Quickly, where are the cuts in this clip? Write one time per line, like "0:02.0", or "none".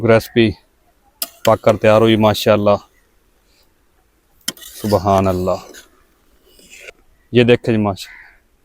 0:06.9